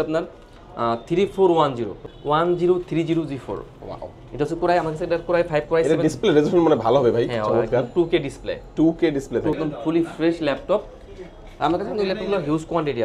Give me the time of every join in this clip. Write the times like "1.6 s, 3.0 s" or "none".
2.1 s, 9.6 s